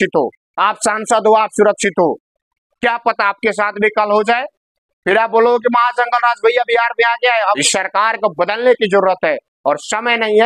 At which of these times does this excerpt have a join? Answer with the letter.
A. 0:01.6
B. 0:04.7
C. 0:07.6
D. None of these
C